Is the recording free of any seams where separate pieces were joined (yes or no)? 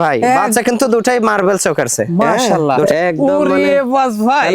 no